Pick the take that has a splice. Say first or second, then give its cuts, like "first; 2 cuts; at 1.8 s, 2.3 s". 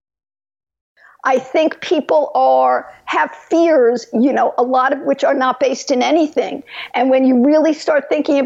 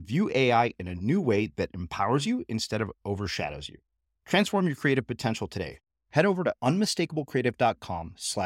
first; 1 cut; at 1.0 s